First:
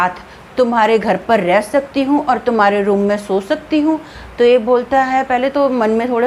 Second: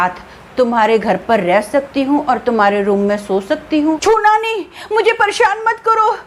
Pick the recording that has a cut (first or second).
second